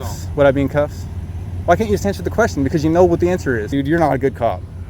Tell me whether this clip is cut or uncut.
cut